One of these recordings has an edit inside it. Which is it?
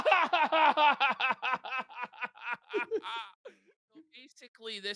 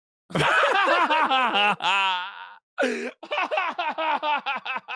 first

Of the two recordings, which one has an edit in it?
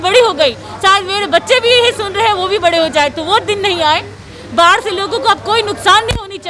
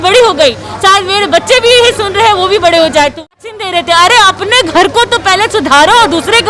second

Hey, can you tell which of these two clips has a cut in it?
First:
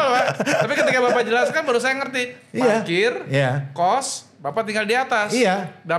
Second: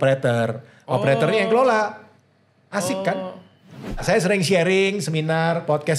second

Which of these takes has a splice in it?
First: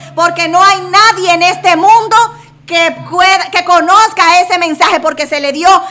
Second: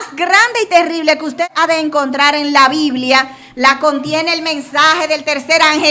second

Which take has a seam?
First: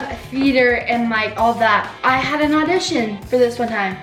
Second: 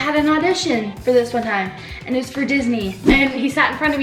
second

